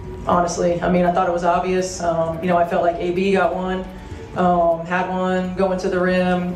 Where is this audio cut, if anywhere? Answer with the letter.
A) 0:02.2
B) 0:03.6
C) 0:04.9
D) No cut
D